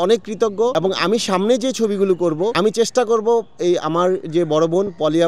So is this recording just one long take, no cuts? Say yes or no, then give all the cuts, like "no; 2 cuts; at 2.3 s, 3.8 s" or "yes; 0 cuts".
no; 2 cuts; at 0.7 s, 2.5 s